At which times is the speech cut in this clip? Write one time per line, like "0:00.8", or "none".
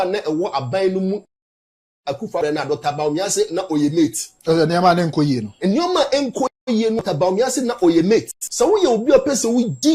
0:08.4